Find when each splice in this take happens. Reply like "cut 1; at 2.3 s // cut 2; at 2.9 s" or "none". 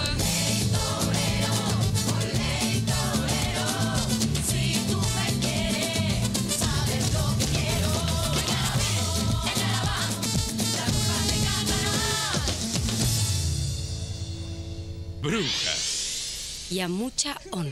cut 1; at 15.2 s